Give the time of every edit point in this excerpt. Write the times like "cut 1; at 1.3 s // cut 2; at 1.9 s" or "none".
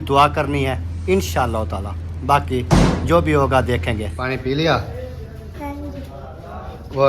cut 1; at 3.8 s